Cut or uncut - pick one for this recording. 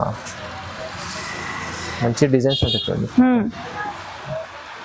uncut